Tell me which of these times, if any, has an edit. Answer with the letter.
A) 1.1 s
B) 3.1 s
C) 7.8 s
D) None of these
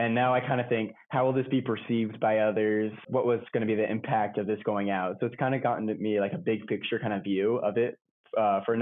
B